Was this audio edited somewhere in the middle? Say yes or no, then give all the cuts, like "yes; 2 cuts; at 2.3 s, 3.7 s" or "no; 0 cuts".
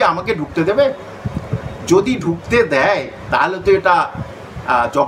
no; 0 cuts